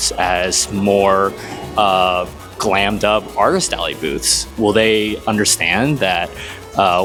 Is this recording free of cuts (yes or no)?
yes